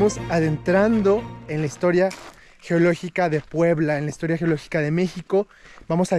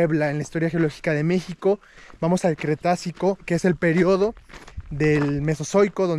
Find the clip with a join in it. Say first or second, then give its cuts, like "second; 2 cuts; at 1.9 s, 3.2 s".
second; 1 cut; at 3.4 s